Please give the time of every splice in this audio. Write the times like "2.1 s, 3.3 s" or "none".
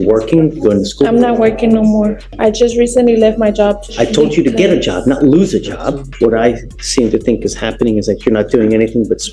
2.2 s, 3.8 s, 6.1 s